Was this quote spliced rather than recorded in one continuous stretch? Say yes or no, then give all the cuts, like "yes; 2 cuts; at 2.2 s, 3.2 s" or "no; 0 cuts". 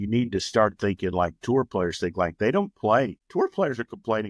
yes; 1 cut; at 3.2 s